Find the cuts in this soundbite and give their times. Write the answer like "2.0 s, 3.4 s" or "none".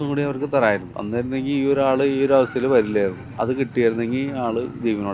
0.9 s, 3.3 s